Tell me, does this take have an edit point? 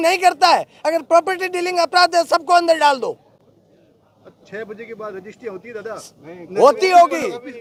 no; 0 cuts

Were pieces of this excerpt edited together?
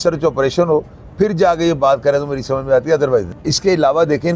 yes; 1 cut; at 3.4 s

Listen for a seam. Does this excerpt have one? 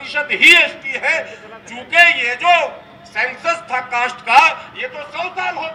no; 0 cuts

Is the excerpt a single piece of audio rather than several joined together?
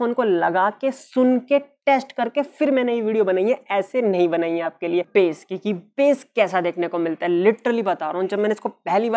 no; 1 cut; at 5.1 s

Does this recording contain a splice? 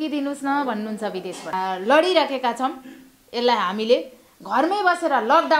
yes; 1 cut; at 1.5 s

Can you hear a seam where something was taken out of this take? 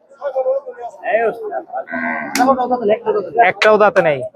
no; 0 cuts

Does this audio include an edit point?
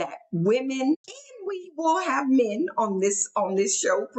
yes; 1 cut; at 1.0 s

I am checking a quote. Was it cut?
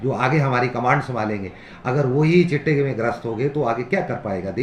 no; 0 cuts

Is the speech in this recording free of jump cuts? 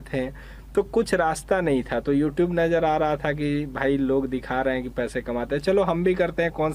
yes; 0 cuts

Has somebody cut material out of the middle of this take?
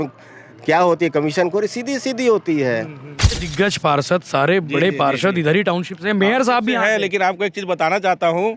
yes; 1 cut; at 3.3 s

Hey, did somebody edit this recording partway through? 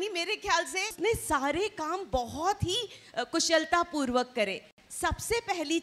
yes; 1 cut; at 0.9 s

